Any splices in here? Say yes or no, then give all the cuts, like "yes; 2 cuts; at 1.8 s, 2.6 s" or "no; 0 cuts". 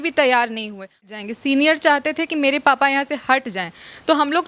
yes; 1 cut; at 1.1 s